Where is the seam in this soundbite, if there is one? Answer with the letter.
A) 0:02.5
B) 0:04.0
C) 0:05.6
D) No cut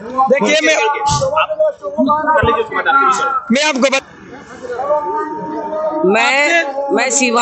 B